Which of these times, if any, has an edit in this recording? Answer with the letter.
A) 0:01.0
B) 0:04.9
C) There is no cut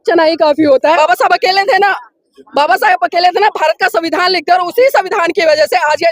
A